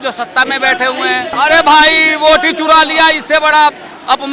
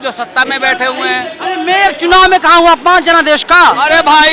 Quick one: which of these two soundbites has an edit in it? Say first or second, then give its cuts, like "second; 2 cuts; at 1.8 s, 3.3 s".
first; 1 cut; at 1.4 s